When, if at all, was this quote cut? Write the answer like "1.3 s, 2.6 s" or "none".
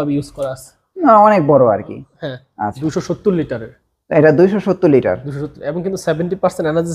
2.8 s